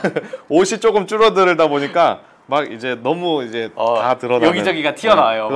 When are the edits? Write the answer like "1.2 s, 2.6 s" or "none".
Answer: none